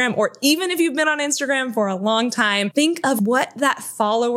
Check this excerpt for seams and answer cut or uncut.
cut